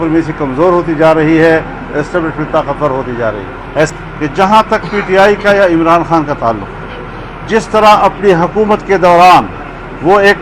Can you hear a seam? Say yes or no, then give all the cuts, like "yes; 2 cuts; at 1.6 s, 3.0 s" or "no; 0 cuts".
yes; 1 cut; at 3.9 s